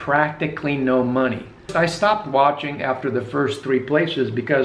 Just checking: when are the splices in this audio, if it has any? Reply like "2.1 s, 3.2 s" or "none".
1.7 s